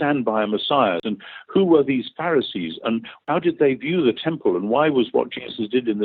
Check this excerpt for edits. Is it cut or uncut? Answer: cut